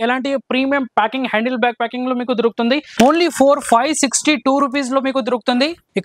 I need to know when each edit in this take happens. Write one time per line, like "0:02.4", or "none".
0:02.9